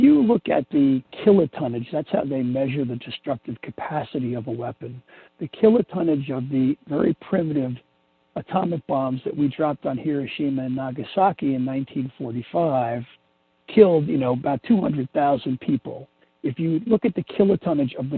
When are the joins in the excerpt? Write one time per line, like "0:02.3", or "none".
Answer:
0:01.1